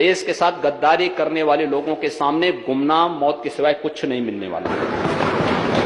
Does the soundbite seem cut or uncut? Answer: uncut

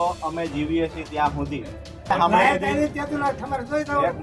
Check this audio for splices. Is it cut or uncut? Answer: cut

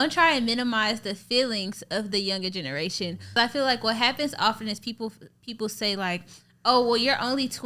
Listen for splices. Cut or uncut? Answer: cut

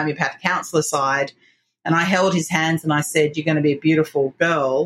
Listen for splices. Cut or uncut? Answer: uncut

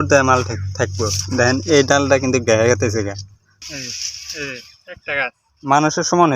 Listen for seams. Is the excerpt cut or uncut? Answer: cut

